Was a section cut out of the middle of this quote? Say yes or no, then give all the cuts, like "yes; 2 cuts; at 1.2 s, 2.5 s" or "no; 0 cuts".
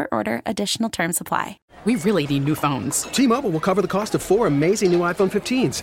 yes; 1 cut; at 1.6 s